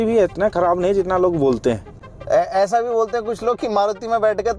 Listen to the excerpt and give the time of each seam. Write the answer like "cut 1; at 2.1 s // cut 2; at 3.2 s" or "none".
cut 1; at 2.0 s